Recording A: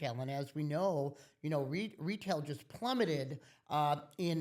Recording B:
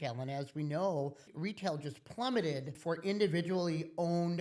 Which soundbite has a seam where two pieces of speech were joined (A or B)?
B